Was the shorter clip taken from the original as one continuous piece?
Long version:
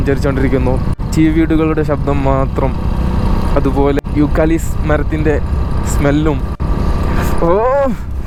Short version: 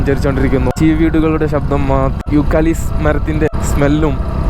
no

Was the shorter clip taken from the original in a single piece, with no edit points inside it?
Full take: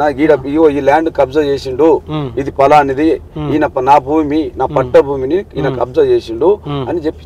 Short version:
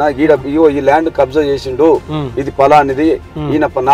yes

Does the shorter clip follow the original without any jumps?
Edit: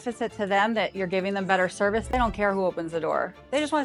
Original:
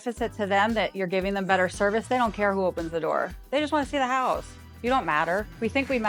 yes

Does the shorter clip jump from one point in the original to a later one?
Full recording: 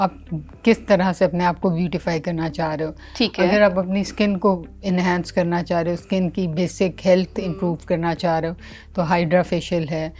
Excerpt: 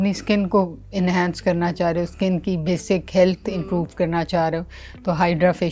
no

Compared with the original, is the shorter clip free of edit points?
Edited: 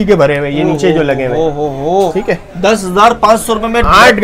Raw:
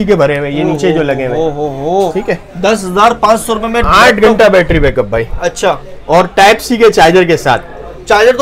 yes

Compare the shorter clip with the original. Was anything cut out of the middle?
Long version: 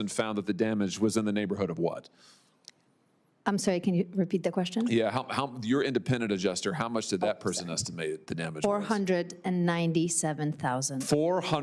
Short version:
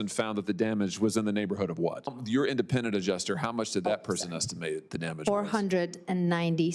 yes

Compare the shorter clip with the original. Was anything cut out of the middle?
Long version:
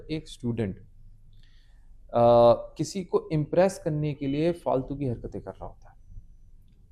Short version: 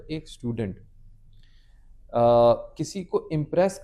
no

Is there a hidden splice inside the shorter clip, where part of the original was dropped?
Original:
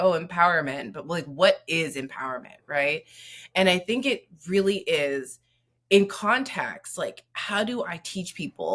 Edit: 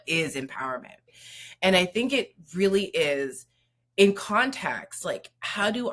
yes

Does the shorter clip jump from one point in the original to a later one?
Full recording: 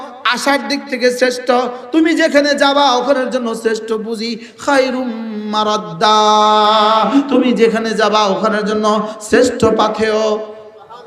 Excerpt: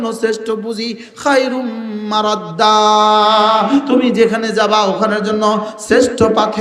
no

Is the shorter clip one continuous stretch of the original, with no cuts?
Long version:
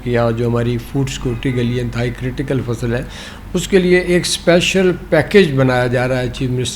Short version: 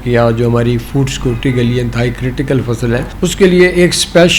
no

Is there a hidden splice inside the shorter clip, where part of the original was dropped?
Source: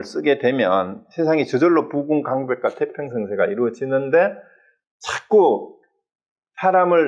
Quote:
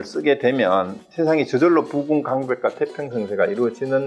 no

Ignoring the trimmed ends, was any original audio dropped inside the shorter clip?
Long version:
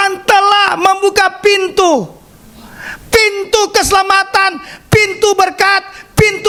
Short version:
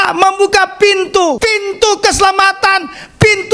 yes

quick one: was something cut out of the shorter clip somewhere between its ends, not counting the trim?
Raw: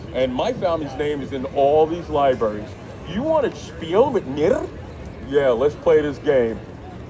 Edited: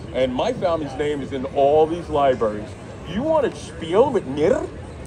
no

